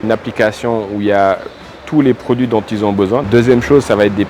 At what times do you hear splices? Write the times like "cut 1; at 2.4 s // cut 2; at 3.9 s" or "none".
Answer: cut 1; at 3.2 s

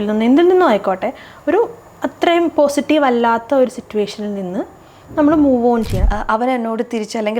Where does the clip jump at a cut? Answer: cut 1; at 6.0 s

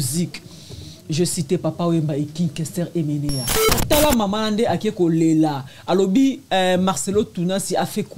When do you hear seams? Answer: cut 1; at 3.7 s

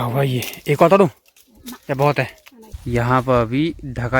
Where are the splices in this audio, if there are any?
cut 1; at 2.8 s

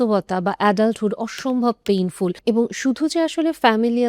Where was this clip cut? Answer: cut 1; at 2.4 s

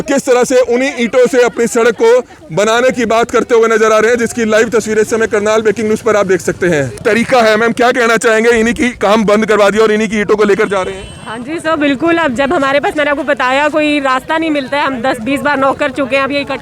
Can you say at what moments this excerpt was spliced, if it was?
cut 1; at 7.0 s

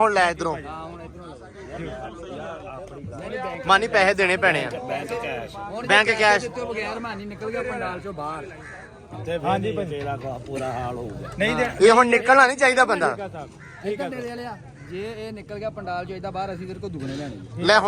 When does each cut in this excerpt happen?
none

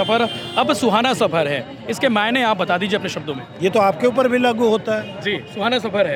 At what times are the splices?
none

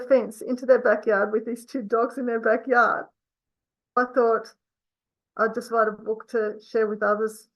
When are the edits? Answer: cut 1; at 4.0 s

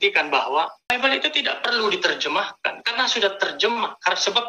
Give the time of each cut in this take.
cut 1; at 0.9 s

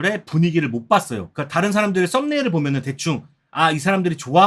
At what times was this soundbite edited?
cut 1; at 1.2 s

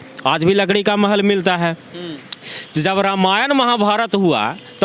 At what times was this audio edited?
none

